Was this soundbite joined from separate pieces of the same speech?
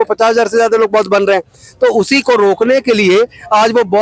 no; 0 cuts

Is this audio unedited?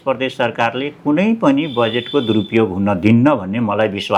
yes; 0 cuts

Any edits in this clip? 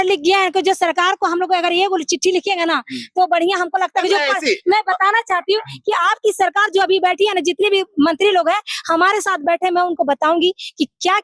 no; 0 cuts

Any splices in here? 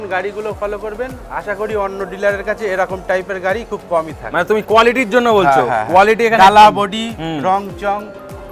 no; 0 cuts

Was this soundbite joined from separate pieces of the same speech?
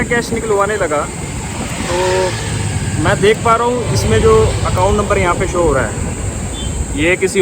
no; 0 cuts

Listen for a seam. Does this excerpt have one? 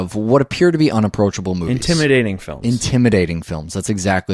yes; 1 cut; at 0.9 s

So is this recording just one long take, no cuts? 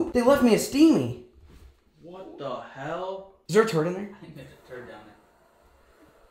yes; 0 cuts

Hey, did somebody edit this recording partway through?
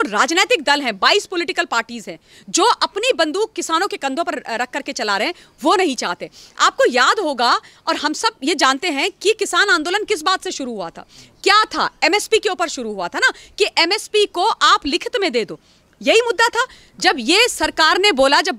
no; 0 cuts

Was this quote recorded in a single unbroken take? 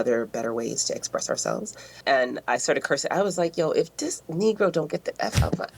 no; 1 cut; at 2.0 s

